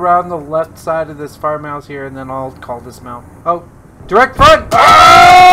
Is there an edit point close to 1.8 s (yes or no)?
no